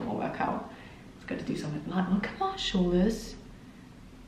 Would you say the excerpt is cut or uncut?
uncut